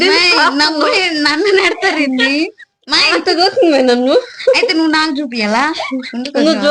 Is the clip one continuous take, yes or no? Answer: yes